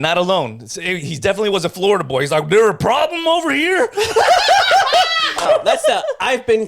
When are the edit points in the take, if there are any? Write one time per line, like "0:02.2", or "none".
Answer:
0:05.5